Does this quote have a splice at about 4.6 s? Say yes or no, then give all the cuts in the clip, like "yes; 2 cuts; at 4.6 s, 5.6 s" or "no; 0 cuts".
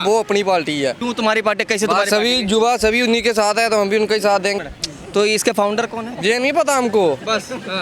yes; 1 cut; at 4.6 s